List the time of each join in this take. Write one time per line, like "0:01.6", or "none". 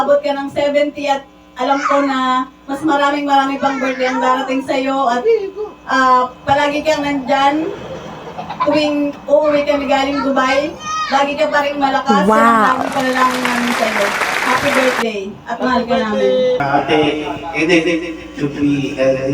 0:16.6